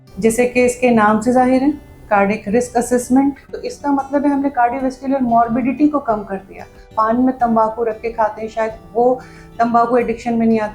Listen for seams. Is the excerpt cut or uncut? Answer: cut